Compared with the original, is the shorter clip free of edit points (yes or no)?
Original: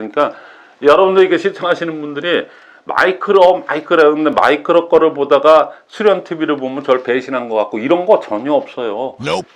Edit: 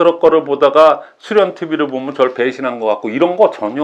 yes